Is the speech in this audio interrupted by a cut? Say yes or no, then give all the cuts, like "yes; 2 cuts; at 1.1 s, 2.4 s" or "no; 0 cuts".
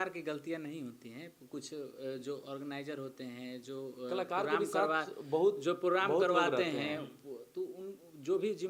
no; 0 cuts